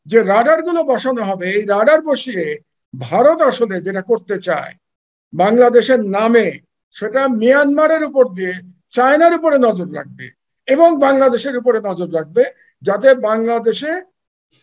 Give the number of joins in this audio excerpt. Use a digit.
0